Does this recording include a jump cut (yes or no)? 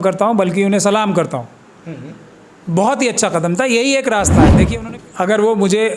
yes